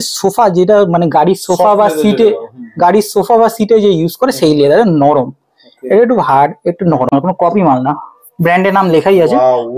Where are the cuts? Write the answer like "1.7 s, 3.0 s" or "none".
7.1 s